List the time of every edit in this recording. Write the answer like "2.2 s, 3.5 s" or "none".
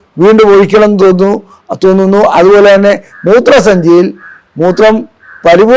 none